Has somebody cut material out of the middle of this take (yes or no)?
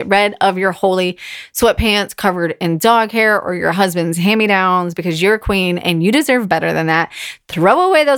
no